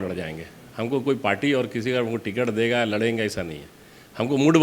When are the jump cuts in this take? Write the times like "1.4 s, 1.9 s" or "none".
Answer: none